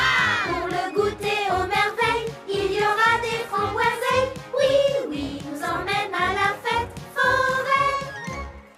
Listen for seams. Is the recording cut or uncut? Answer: cut